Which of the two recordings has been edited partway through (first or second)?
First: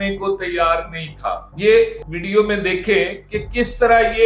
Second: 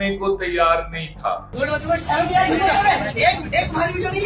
second